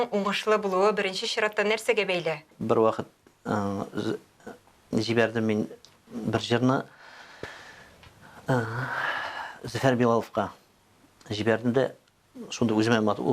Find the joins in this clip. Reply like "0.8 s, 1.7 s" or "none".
2.5 s